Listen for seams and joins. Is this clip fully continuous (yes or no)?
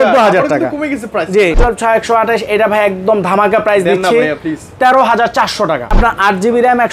no